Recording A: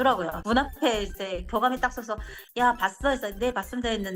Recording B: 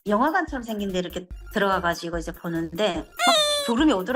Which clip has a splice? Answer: B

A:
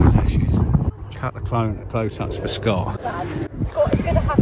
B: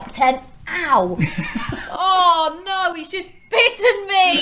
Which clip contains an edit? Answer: A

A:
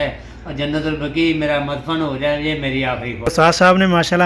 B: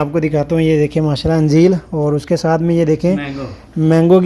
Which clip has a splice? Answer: A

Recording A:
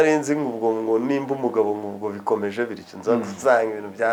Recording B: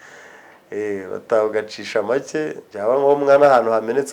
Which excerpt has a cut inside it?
B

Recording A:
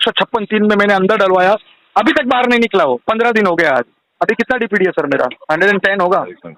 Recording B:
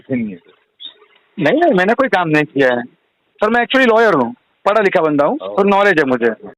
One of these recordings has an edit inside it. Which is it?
A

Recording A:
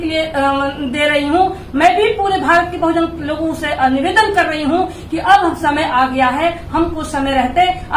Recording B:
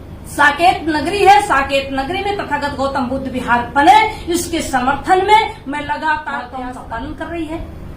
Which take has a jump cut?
B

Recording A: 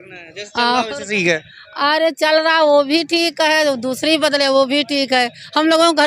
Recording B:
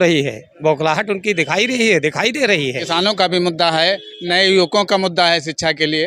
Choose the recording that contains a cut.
B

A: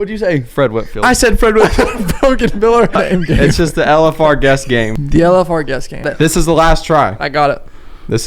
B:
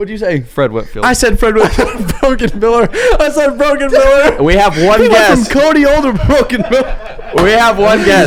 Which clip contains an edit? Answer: A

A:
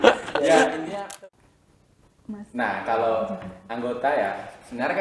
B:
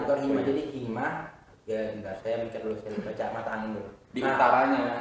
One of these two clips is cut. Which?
A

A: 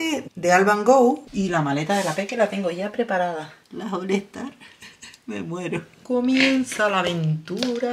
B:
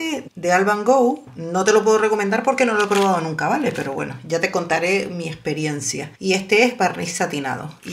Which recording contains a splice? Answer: A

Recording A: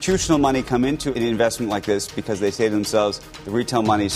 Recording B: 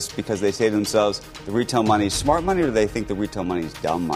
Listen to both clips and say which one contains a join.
A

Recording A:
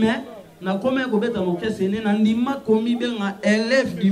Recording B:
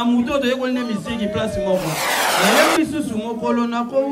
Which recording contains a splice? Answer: B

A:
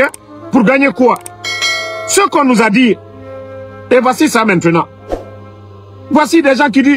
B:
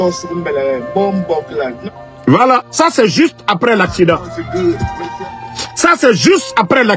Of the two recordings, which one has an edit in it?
B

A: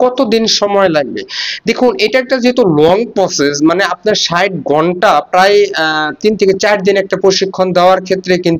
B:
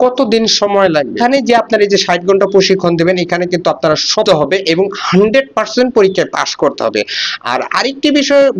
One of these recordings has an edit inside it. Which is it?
B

